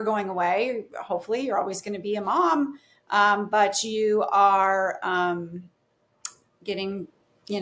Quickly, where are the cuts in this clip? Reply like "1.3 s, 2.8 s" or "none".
none